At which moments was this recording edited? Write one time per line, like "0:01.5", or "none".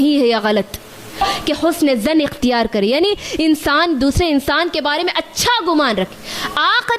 0:01.2

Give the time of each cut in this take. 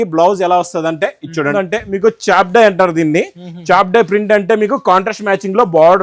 0:01.5

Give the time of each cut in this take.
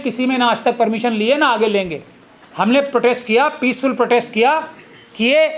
none

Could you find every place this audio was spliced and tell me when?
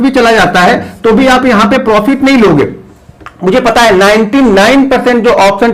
none

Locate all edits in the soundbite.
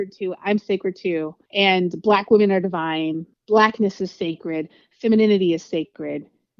0:01.4
0:03.3

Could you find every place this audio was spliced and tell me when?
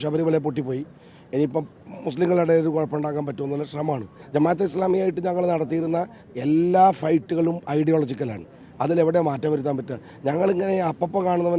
0:04.2

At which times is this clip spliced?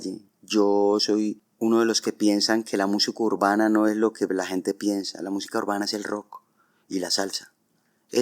0:01.4

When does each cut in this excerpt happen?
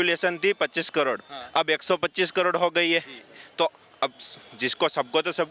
none

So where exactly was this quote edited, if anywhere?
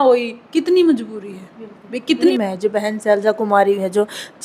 0:02.3

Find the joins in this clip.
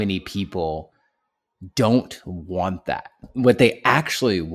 0:03.2

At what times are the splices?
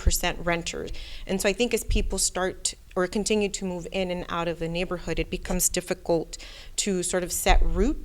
0:00.9

